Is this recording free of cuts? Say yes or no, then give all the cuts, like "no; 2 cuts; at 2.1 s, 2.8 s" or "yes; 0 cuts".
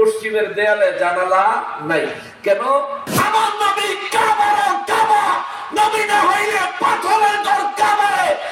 no; 1 cut; at 3.0 s